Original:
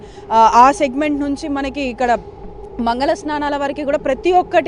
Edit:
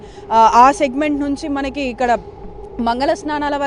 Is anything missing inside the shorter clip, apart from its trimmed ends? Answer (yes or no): no